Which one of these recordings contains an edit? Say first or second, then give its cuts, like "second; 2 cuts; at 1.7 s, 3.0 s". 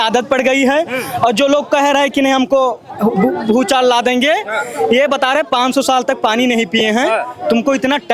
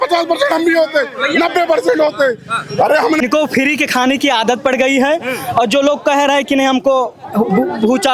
second; 1 cut; at 3.2 s